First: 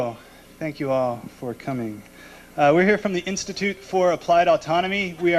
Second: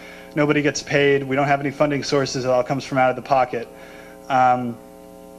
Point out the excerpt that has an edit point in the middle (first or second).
second